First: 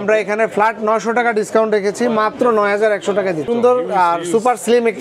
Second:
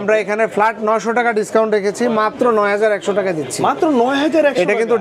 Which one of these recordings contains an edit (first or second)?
first